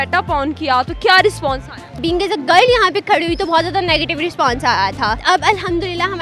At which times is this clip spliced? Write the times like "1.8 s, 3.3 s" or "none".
2.0 s, 5.2 s